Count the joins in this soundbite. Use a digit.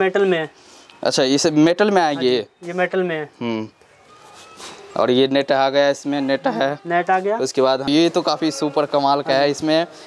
1